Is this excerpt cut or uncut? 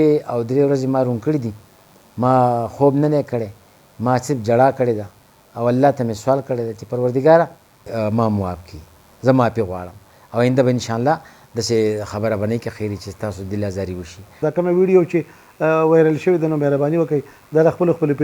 cut